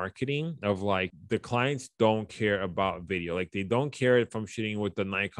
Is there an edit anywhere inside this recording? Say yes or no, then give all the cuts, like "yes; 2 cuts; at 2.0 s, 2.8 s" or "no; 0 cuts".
yes; 1 cut; at 1.1 s